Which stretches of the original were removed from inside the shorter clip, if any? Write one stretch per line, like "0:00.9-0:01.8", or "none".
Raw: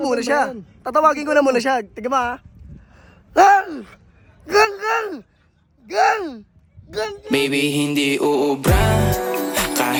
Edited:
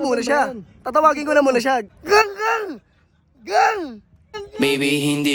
0:01.9-0:04.4
0:06.9-0:07.1